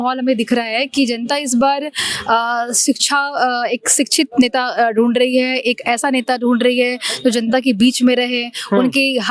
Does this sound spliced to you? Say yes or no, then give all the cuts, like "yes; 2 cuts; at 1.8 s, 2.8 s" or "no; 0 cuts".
no; 0 cuts